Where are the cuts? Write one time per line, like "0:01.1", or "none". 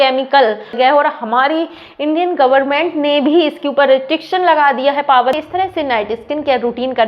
0:00.7
0:05.4